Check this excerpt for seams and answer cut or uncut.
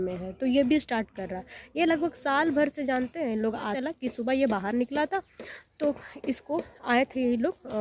cut